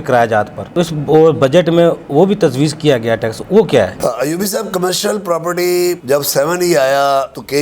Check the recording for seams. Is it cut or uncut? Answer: uncut